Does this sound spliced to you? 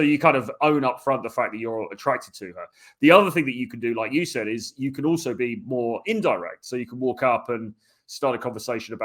no; 0 cuts

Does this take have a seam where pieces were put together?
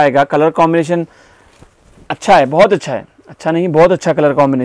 no; 0 cuts

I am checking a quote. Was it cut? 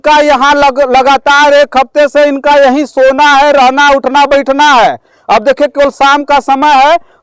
no; 0 cuts

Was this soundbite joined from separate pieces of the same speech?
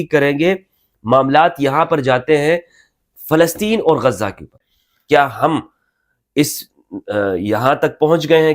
yes; 1 cut; at 4.6 s

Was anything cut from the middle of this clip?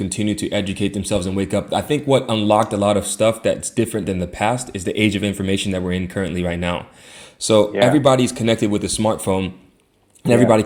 no; 0 cuts

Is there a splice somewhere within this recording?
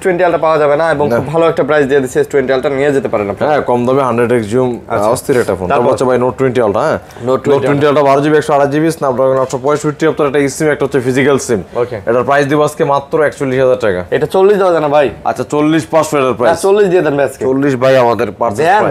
no; 0 cuts

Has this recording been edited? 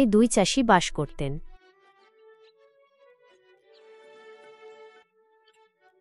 yes; 1 cut; at 1.4 s

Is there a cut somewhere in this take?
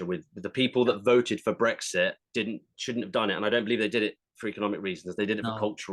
no; 0 cuts

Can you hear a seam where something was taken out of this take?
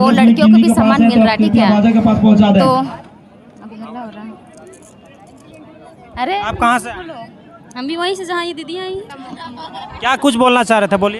no; 0 cuts

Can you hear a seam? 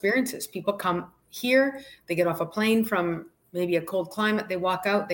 no; 0 cuts

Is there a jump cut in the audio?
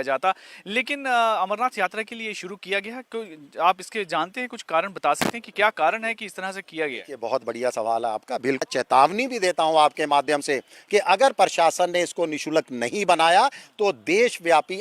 yes; 1 cut; at 8.6 s

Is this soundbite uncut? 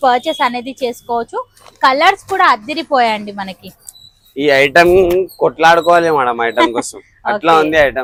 yes; 0 cuts

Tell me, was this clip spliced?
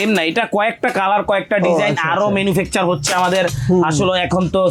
no; 0 cuts

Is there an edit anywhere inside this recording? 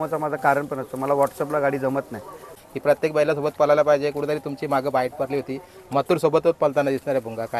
yes; 1 cut; at 2.5 s

